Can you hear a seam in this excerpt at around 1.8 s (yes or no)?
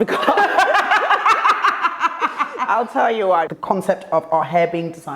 no